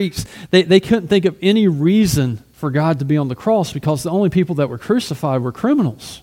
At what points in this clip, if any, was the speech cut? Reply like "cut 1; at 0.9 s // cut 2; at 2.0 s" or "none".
cut 1; at 2.5 s